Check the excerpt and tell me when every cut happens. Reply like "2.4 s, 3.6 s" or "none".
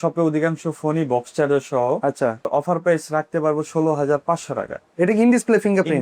2.5 s